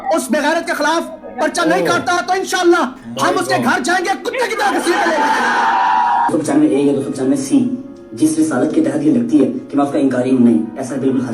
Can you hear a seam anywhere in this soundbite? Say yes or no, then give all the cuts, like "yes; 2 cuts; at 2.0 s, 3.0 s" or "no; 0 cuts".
yes; 1 cut; at 6.3 s